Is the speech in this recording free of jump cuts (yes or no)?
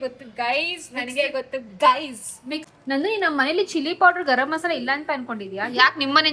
no